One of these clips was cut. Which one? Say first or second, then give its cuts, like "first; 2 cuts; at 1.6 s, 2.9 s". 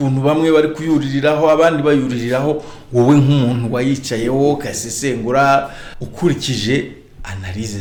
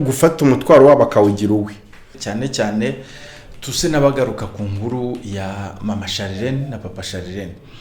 second; 1 cut; at 2.2 s